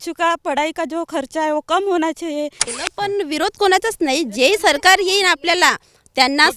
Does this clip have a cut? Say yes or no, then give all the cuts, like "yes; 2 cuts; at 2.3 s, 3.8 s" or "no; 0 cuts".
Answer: yes; 1 cut; at 2.6 s